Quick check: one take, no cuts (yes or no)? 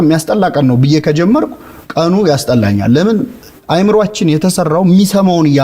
yes